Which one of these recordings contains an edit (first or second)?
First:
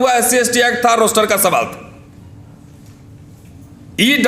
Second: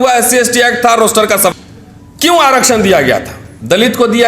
second